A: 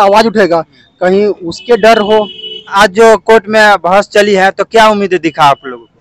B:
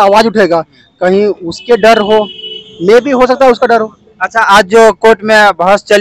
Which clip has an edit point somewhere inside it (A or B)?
A